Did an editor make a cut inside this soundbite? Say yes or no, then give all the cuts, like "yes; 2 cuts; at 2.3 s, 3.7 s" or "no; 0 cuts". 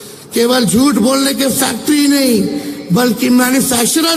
no; 0 cuts